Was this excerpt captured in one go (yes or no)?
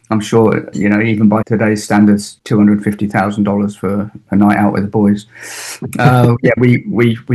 no